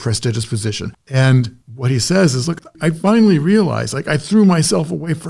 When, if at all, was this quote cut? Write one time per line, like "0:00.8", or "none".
0:01.1
0:02.7

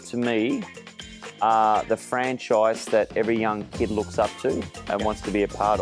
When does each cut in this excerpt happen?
none

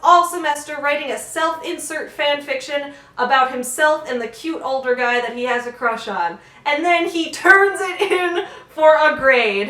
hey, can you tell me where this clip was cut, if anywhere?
none

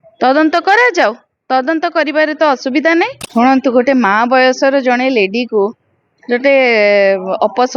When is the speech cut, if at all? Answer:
0:03.2

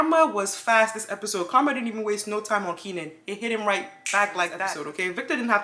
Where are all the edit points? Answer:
0:04.7

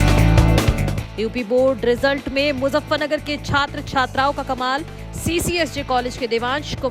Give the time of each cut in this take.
0:00.9

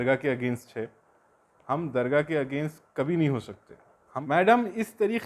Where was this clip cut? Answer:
0:04.1

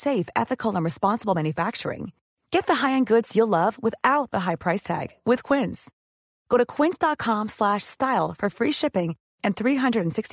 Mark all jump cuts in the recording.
none

